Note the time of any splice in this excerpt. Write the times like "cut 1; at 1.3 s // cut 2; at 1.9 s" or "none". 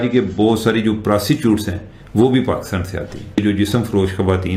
cut 1; at 3.4 s